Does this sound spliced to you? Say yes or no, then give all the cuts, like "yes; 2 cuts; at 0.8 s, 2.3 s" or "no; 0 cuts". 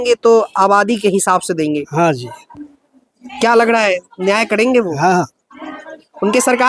no; 0 cuts